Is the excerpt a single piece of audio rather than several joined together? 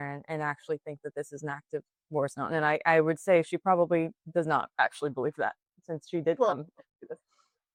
yes; 0 cuts

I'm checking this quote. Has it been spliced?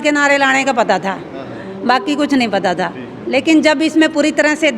no; 0 cuts

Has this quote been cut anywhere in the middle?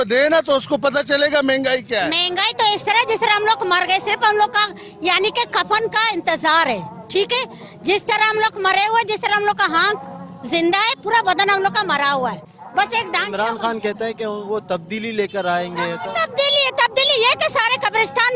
yes; 2 cuts; at 2.2 s, 12.5 s

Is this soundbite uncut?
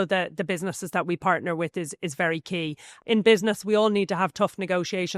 no; 1 cut; at 2.9 s

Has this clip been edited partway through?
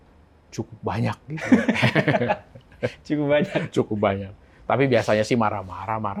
no; 0 cuts

